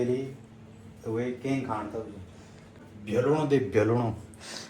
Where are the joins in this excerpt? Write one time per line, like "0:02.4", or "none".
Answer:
0:02.8